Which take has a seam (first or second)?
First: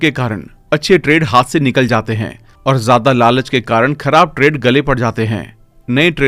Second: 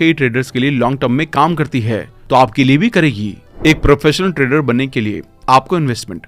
second